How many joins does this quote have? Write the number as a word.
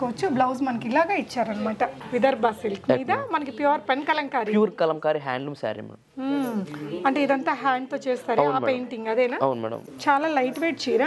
two